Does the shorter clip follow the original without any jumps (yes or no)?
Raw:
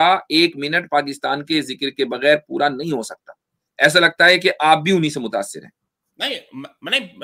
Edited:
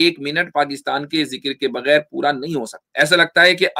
no